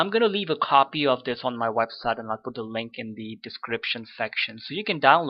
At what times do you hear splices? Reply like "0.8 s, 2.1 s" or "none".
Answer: 2.9 s